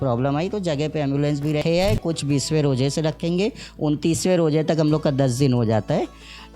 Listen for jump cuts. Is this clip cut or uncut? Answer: cut